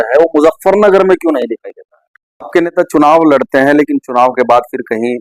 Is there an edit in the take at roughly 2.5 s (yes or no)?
yes